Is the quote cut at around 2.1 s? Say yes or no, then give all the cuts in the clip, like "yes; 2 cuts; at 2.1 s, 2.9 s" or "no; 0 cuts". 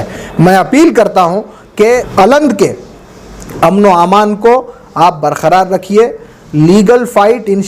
yes; 1 cut; at 2.1 s